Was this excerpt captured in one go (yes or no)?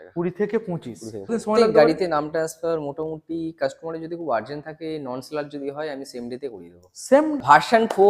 no